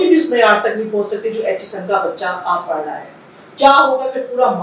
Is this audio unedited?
yes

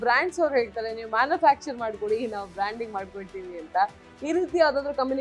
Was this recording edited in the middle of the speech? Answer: no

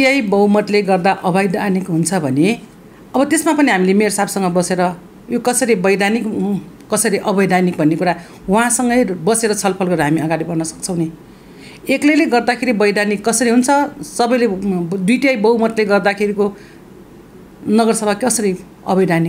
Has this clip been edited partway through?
no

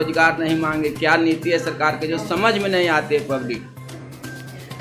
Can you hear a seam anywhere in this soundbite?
no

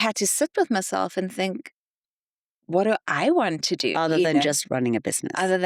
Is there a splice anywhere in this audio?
no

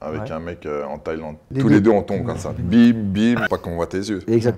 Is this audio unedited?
no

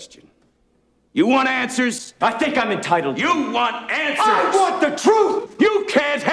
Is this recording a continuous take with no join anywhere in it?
yes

